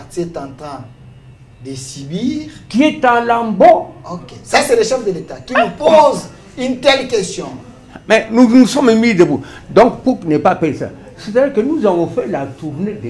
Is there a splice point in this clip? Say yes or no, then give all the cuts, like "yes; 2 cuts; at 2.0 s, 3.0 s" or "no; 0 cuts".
no; 0 cuts